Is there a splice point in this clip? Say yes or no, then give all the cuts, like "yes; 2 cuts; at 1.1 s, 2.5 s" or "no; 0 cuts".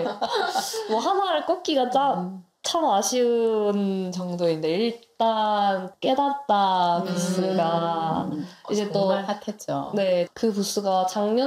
no; 0 cuts